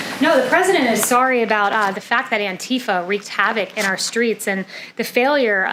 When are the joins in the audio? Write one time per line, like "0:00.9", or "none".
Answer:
none

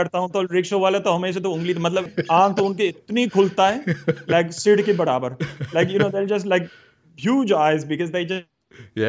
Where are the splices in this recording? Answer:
0:02.1

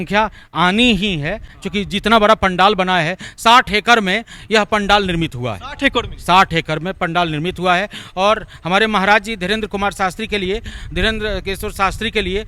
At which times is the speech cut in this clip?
none

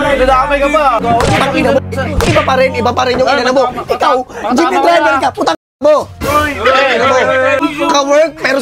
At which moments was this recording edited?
0:01.0
0:07.6

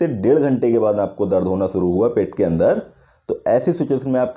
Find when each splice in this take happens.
none

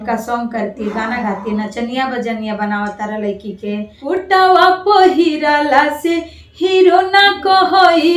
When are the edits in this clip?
0:03.9

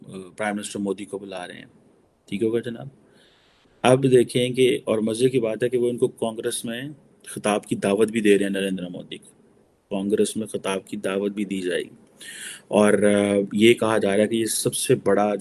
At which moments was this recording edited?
none

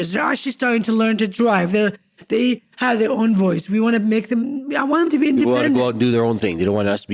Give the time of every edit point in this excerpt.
none

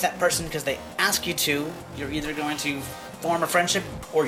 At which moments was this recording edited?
0:03.0

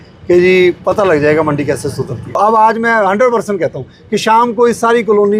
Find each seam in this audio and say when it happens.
0:02.4

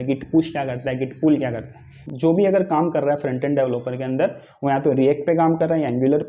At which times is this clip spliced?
0:01.9

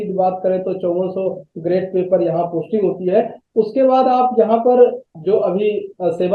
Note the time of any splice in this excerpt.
0:05.1

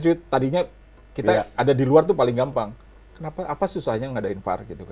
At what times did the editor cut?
none

